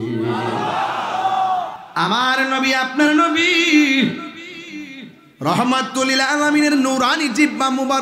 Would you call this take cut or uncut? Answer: cut